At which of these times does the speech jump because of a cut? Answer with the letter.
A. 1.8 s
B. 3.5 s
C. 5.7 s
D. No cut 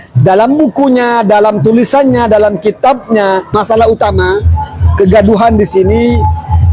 B